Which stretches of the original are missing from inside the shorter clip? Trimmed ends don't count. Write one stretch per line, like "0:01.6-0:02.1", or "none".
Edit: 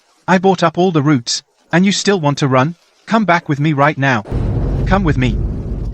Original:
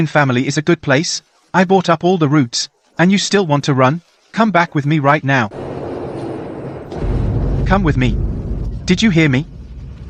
0:05.6-0:07.1